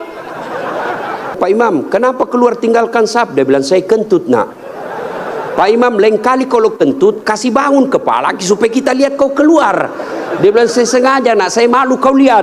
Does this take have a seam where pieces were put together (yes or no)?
yes